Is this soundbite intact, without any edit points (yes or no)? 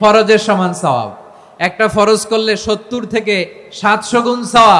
yes